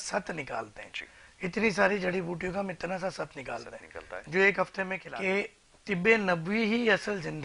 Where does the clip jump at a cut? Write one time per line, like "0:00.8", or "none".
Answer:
0:05.0